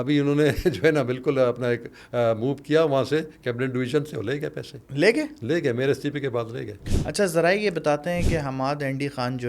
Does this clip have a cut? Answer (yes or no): yes